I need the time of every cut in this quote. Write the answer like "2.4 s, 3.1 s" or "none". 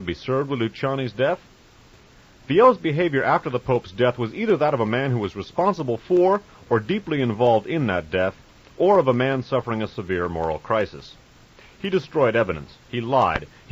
none